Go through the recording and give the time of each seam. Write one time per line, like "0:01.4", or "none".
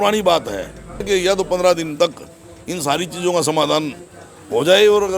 0:01.0